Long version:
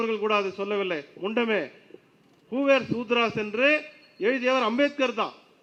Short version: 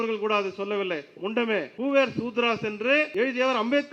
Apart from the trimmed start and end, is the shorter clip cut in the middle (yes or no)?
yes